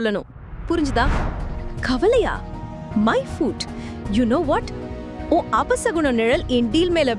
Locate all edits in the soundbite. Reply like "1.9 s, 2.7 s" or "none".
1.2 s